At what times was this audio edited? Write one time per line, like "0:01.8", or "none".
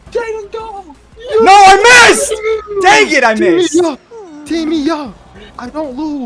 none